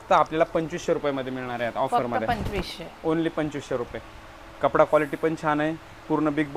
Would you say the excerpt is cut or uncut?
uncut